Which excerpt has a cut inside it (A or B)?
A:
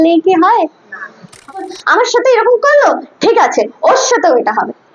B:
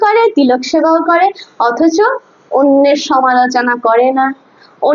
A